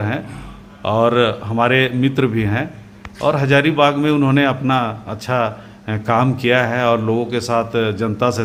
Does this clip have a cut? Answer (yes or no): no